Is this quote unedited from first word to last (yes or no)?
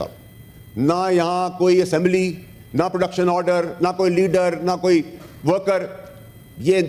yes